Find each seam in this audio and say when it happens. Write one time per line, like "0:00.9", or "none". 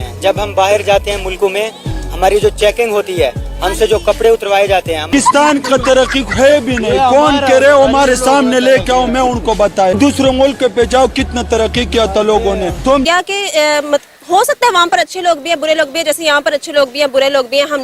0:05.0
0:10.0
0:13.0